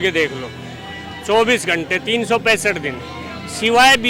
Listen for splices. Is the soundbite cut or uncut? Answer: uncut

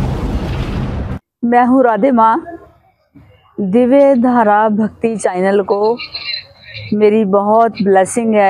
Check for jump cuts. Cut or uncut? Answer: cut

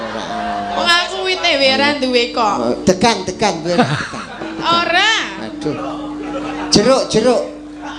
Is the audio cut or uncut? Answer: uncut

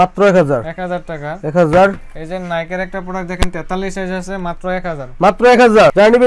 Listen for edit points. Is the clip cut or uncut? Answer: uncut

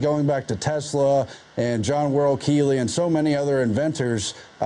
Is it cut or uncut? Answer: cut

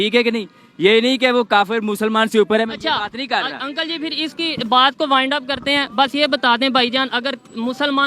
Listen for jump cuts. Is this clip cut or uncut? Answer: uncut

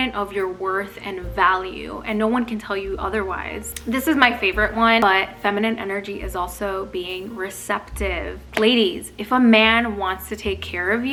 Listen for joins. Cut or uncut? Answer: uncut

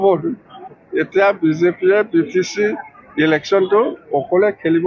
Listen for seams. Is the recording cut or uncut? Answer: uncut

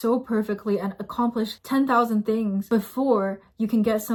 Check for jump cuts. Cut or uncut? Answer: uncut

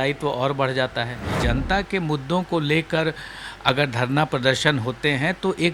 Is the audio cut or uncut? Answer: cut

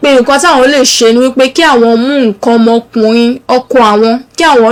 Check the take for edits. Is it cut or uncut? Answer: uncut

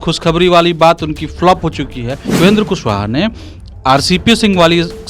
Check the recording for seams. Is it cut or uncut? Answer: cut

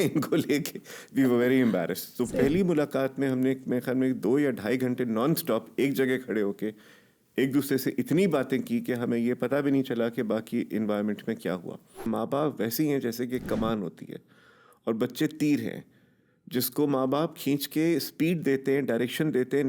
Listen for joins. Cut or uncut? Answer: cut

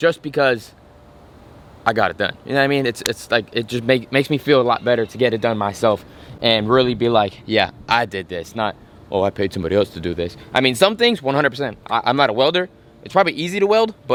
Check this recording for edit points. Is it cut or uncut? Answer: uncut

